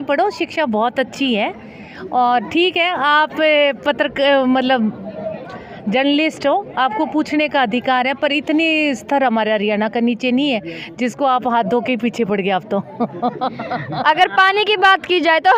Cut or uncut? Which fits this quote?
uncut